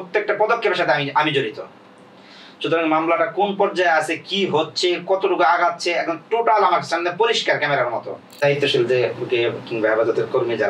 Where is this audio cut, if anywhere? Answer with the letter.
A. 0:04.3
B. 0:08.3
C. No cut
B